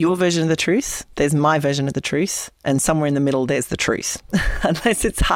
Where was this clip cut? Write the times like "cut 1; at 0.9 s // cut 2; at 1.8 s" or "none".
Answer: cut 1; at 1.0 s